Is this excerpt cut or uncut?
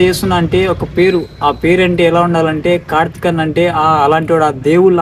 uncut